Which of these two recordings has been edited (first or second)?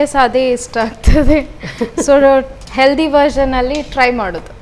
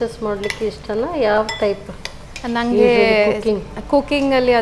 first